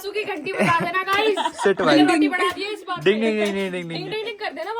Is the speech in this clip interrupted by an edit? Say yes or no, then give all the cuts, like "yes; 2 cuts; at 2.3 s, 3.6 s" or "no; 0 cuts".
no; 0 cuts